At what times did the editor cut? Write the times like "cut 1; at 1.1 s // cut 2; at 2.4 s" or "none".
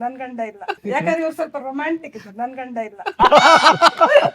cut 1; at 0.8 s // cut 2; at 3.1 s